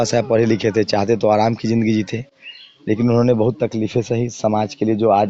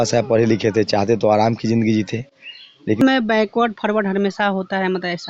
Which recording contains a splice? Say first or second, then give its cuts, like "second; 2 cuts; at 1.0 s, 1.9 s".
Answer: second; 1 cut; at 3.0 s